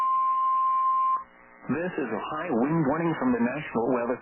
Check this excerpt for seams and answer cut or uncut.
cut